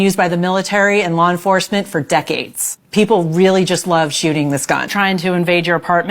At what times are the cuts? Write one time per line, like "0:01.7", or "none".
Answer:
0:04.9